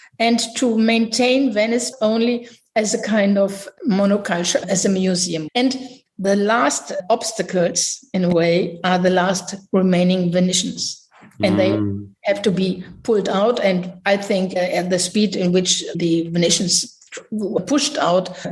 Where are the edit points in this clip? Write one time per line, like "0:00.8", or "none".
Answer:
0:01.9
0:05.4